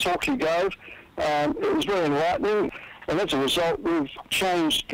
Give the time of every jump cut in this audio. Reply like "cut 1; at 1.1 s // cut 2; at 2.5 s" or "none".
cut 1; at 2.7 s // cut 2; at 4.2 s